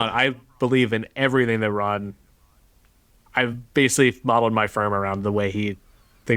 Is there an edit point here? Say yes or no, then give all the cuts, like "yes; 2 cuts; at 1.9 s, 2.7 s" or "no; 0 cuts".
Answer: no; 0 cuts